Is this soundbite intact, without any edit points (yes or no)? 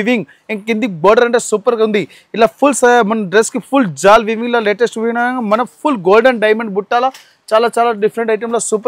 yes